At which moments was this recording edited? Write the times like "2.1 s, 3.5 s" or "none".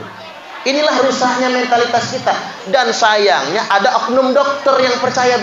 none